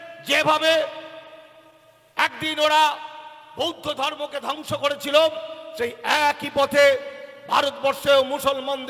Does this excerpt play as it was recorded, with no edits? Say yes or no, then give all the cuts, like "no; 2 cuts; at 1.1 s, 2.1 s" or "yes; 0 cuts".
yes; 0 cuts